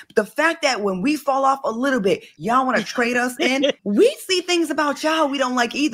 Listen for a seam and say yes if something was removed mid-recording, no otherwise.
yes